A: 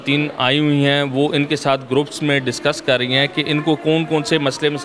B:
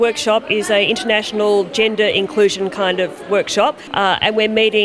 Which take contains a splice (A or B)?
B